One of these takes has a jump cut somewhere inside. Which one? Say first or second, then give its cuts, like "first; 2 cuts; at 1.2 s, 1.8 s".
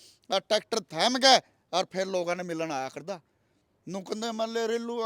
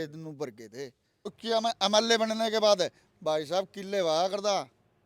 second; 1 cut; at 1.4 s